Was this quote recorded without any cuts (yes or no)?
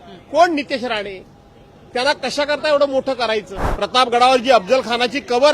no